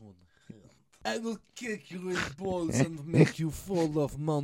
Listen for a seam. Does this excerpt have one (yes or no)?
yes